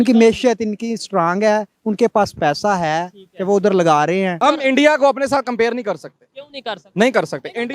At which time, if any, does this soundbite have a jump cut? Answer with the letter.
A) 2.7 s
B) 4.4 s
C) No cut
B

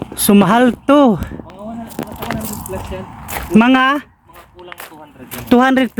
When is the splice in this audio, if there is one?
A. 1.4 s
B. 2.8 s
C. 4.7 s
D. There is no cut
D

